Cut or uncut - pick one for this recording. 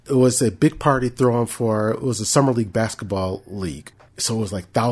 uncut